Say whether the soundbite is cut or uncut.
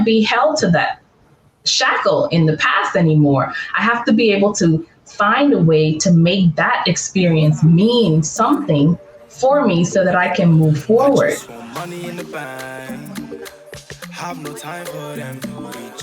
cut